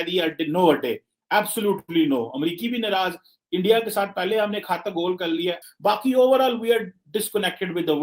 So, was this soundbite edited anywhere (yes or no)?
yes